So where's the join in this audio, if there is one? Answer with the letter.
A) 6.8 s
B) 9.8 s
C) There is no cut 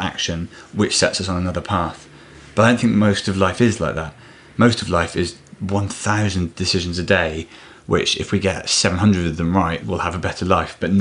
B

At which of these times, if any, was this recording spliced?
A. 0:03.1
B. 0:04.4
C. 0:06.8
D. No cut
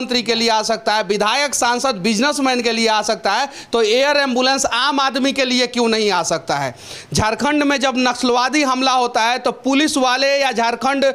D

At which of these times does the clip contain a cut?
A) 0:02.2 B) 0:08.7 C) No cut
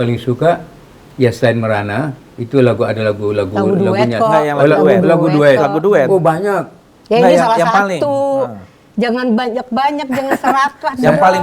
C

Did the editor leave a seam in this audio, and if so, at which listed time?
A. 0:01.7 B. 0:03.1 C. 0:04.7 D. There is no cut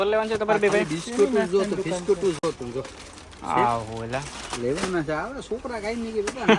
D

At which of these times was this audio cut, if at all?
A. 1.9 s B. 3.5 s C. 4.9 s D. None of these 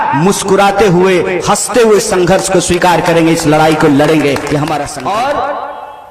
C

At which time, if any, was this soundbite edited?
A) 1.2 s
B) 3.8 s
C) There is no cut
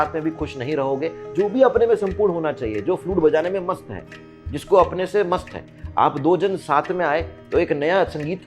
A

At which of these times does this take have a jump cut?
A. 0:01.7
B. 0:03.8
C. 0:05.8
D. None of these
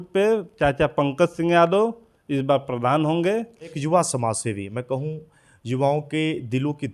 B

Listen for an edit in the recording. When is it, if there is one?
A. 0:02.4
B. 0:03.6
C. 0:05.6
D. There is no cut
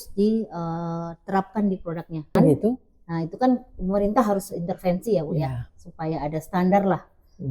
A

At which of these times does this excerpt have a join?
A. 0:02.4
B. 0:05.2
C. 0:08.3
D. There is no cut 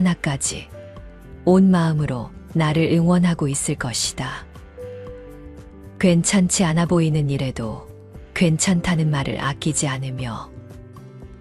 D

